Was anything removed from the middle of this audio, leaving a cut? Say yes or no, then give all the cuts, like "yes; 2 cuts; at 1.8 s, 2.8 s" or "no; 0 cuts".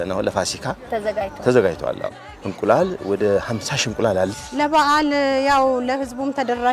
yes; 1 cut; at 4.3 s